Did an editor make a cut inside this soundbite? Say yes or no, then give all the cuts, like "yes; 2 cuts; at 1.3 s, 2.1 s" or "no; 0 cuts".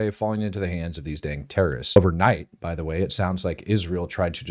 yes; 1 cut; at 1.9 s